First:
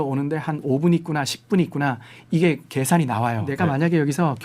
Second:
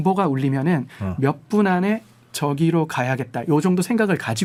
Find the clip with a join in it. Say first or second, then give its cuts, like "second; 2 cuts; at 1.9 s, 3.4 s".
first; 1 cut; at 3.5 s